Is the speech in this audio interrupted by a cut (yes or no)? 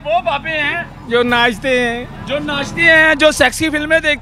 no